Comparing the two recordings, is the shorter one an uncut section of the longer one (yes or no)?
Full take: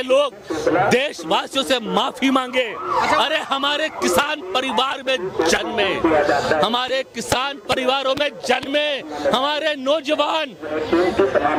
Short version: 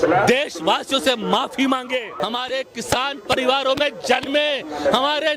no